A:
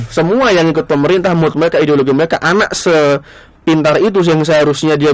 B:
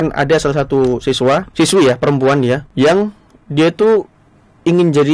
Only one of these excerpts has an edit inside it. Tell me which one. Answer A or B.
B